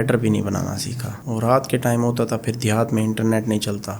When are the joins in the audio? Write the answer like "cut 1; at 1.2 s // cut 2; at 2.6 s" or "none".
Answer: cut 1; at 1.1 s